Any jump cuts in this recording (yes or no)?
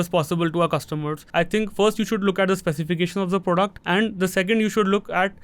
yes